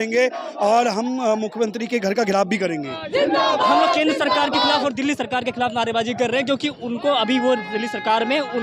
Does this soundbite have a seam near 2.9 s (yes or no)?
yes